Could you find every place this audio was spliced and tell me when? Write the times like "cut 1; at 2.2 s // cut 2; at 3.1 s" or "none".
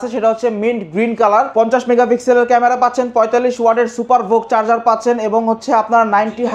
cut 1; at 1.5 s